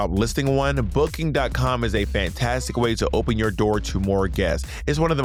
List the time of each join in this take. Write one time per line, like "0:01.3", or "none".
none